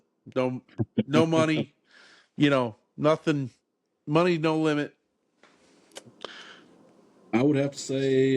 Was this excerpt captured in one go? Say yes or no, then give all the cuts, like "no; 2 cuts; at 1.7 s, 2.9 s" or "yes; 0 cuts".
yes; 0 cuts